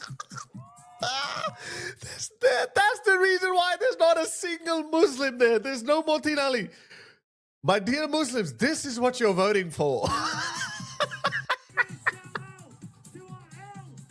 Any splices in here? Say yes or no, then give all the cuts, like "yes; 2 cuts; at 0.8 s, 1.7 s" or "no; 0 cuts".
no; 0 cuts